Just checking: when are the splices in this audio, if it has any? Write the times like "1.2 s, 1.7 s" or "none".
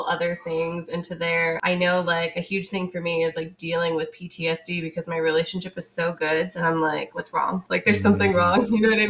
1.6 s, 7.6 s